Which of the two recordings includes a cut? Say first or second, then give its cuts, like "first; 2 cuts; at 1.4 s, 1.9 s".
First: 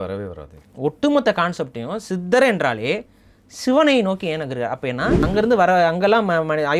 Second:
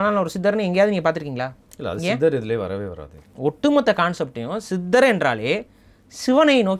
first; 1 cut; at 5.2 s